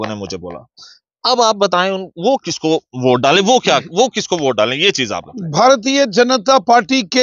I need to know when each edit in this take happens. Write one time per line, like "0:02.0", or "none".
none